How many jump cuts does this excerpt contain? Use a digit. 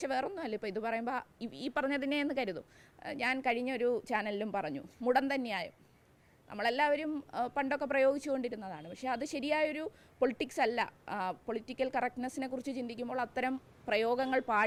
0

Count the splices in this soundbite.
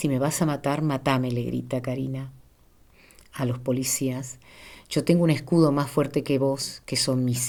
0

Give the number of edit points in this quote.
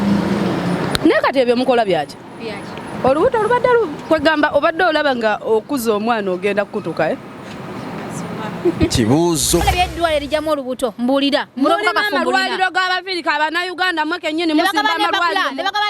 1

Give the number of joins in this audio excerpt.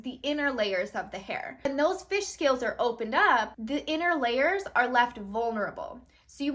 2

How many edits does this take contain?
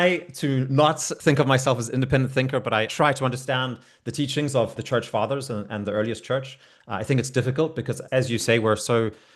4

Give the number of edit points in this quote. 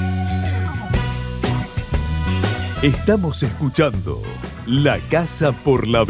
0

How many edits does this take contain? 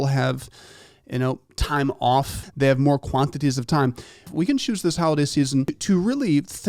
3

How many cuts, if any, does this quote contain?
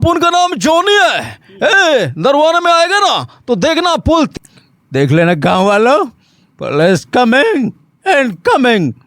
1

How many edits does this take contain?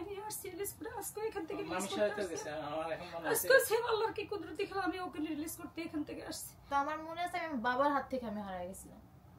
1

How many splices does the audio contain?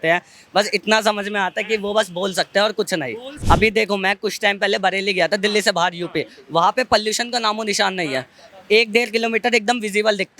1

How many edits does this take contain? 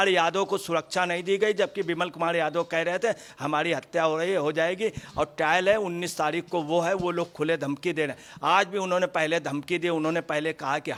0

